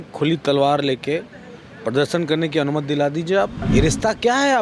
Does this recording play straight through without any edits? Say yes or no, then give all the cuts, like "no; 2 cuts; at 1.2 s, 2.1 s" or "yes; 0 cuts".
no; 1 cut; at 3.6 s